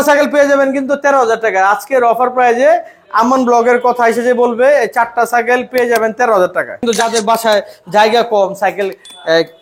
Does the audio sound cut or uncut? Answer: cut